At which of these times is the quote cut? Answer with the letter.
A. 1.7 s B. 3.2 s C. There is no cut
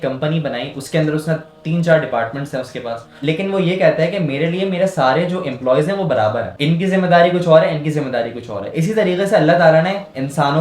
B